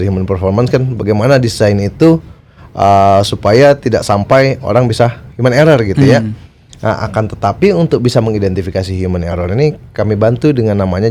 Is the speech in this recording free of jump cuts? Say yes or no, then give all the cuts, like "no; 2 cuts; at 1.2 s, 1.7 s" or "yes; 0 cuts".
yes; 0 cuts